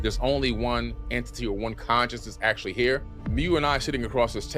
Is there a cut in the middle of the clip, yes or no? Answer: yes